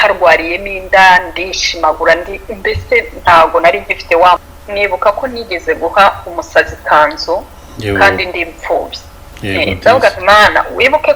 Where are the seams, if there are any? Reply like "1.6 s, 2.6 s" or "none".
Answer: 4.5 s

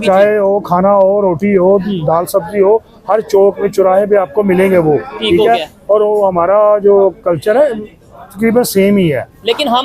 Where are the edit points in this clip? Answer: none

